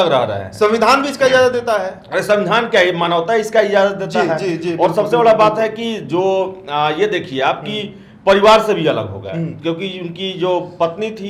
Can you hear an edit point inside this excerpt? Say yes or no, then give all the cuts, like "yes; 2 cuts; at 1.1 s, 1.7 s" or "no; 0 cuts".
no; 0 cuts